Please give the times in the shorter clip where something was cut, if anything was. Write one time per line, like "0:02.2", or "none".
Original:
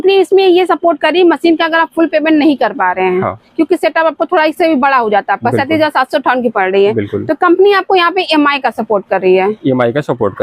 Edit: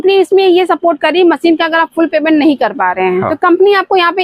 0:03.3